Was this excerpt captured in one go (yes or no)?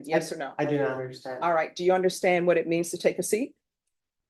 yes